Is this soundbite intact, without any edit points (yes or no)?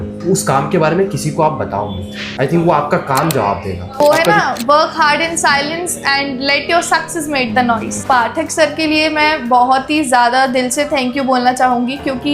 no